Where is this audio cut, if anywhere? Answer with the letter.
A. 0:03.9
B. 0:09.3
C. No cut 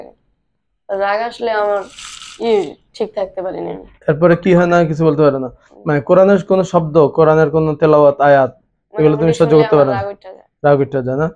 C